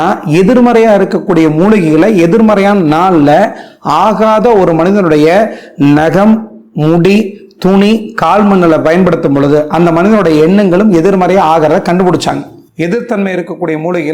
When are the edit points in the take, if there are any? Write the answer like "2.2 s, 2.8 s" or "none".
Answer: none